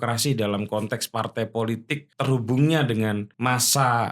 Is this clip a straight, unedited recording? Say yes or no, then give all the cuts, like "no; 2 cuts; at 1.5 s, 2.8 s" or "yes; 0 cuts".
no; 2 cuts; at 2.1 s, 3.3 s